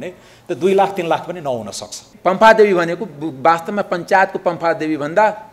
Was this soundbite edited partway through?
yes; 1 cut; at 2.0 s

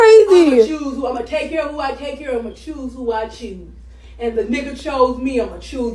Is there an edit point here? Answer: no; 0 cuts

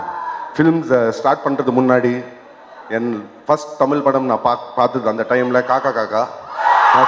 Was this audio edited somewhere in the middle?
no; 0 cuts

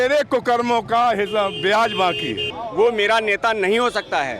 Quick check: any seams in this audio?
yes; 1 cut; at 2.5 s

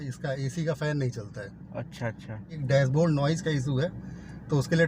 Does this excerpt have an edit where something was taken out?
yes; 1 cut; at 2.6 s

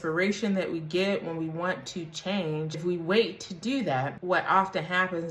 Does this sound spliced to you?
yes; 2 cuts; at 2.8 s, 4.1 s

